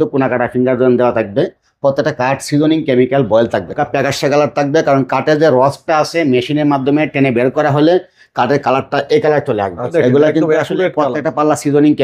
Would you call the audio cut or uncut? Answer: cut